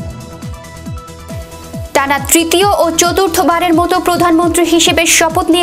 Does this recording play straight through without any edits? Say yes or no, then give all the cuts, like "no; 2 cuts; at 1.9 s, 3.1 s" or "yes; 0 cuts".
no; 1 cut; at 1.9 s